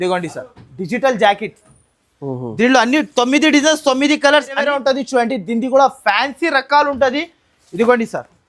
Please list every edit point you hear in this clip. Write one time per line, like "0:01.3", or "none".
none